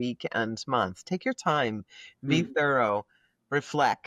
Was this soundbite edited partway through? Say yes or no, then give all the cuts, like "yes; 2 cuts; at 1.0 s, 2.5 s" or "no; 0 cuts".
no; 0 cuts